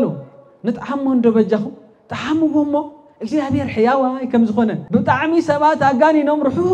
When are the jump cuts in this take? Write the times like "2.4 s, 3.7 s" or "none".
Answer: 4.8 s

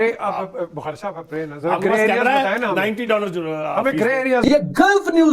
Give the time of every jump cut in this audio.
4.4 s

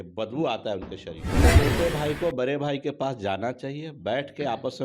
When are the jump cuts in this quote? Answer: 1.5 s

